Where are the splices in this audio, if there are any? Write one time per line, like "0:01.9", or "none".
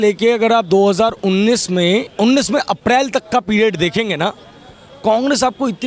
0:02.1